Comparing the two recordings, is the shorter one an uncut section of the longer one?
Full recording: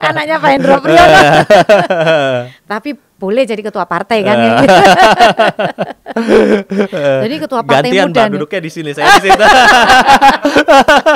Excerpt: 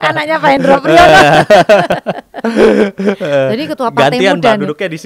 no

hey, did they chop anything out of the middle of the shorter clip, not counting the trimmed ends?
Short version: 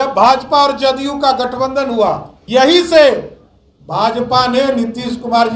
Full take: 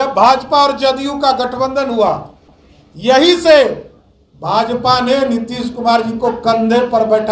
yes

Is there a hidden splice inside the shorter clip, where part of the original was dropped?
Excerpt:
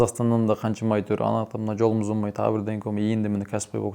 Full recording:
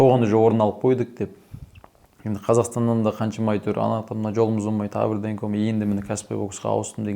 no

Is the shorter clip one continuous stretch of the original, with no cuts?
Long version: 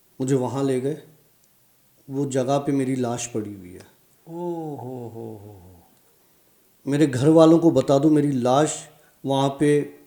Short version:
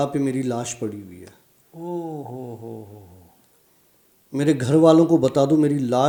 yes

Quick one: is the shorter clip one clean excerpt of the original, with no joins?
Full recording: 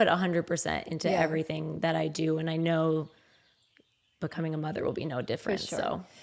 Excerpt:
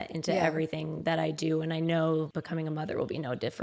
no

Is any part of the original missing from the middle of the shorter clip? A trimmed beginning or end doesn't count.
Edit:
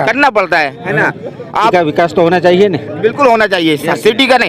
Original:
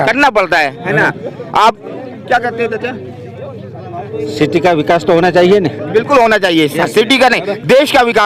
yes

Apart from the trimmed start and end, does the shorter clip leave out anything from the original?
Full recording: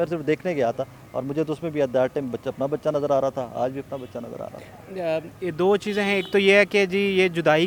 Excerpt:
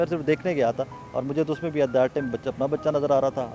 no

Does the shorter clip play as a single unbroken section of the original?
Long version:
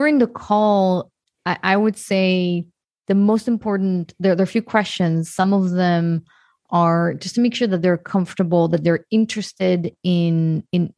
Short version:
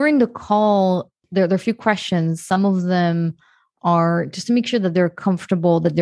no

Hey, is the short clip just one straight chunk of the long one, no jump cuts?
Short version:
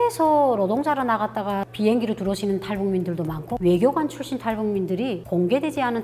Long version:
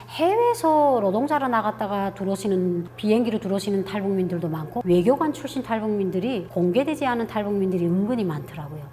no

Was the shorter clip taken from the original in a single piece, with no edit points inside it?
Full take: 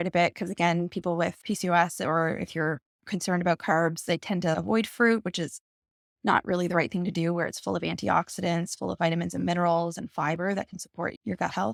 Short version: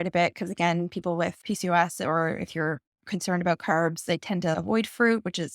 yes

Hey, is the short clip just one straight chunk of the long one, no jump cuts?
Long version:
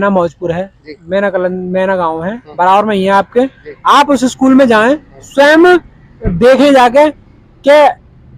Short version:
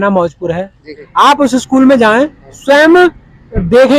no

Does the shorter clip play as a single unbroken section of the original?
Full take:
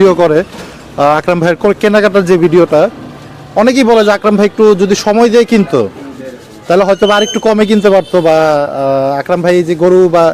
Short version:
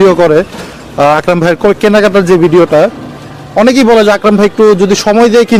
yes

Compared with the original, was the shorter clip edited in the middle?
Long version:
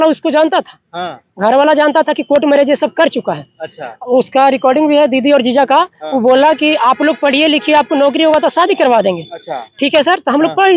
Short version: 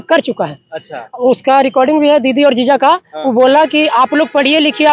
no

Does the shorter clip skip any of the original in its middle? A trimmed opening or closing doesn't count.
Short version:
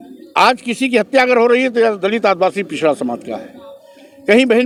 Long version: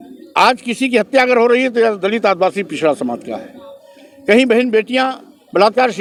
no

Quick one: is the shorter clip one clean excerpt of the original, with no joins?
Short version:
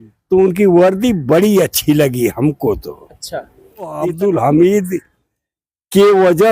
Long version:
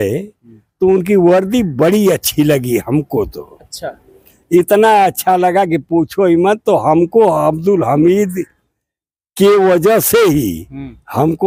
no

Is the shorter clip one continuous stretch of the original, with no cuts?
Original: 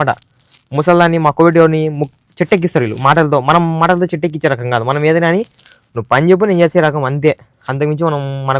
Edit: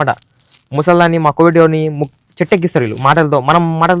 yes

